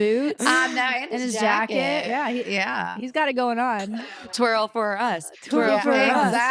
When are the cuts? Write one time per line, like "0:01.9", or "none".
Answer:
0:04.3